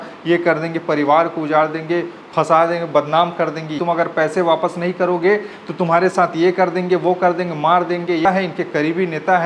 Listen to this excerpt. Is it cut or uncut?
cut